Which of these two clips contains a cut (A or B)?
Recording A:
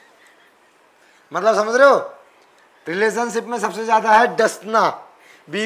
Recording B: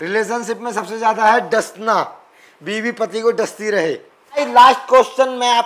B